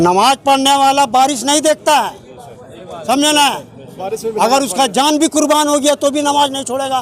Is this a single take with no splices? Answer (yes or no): yes